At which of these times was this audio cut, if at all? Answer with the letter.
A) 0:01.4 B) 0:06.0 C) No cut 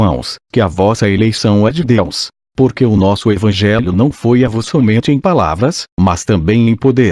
C